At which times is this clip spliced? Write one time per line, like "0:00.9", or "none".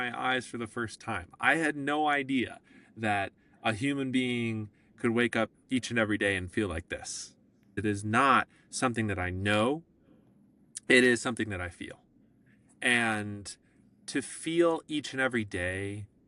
0:07.8